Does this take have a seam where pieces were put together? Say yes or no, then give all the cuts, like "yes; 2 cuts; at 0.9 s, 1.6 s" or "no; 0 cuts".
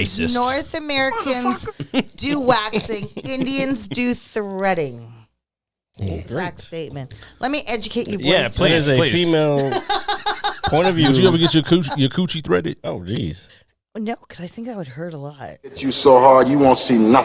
yes; 1 cut; at 15.9 s